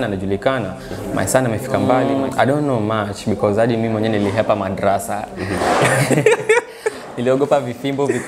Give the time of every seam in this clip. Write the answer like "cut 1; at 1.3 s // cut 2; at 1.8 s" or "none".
cut 1; at 2.0 s